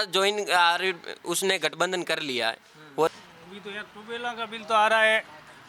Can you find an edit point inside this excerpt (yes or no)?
yes